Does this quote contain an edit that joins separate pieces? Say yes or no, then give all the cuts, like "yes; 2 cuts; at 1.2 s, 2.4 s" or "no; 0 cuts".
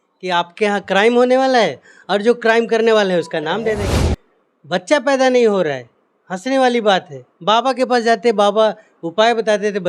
yes; 1 cut; at 3.9 s